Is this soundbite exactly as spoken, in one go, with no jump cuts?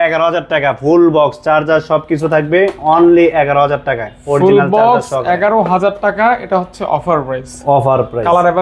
yes; 0 cuts

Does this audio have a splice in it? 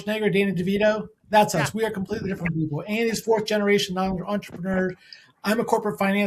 no; 0 cuts

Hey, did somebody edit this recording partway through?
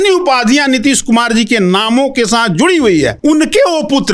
yes; 1 cut; at 3.1 s

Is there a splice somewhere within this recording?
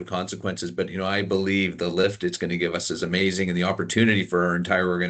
no; 0 cuts

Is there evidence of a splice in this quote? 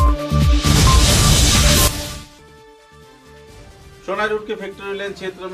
yes; 2 cuts; at 1.9 s, 3.6 s

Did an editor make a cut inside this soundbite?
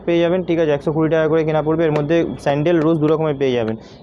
no; 0 cuts

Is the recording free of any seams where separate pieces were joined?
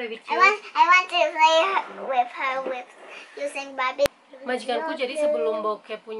no; 1 cut; at 4.1 s

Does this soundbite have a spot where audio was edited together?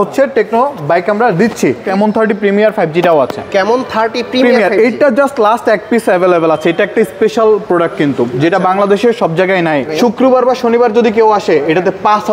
yes; 2 cuts; at 1.8 s, 9.9 s

